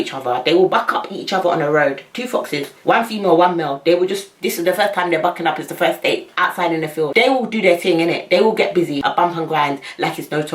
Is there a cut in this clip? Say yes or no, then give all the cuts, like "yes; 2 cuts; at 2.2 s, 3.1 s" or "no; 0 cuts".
yes; 2 cuts; at 7.1 s, 9.0 s